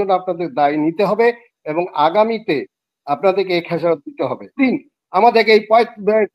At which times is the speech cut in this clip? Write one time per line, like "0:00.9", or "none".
0:04.6